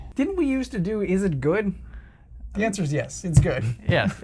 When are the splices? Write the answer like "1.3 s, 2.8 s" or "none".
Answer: none